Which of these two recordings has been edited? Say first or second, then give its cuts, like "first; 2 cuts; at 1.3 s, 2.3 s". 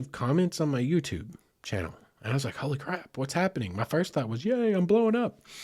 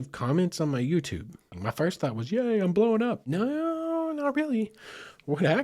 second; 2 cuts; at 1.5 s, 3.2 s